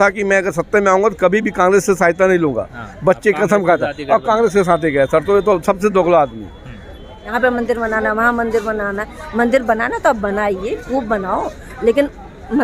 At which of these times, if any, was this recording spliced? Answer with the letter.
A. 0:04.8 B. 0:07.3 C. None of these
B